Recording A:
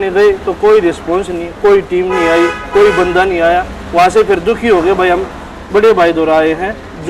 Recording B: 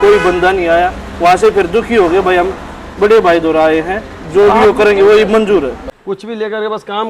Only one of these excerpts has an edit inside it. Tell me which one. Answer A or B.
B